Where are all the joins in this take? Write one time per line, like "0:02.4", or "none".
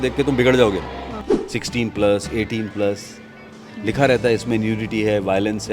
0:01.2